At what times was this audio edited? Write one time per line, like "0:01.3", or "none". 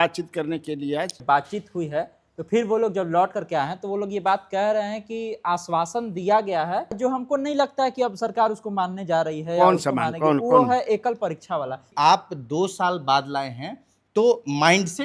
0:01.1
0:07.0
0:11.9